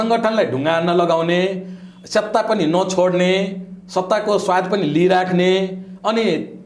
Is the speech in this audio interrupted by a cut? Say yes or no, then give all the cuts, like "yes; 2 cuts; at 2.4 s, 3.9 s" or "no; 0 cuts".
no; 0 cuts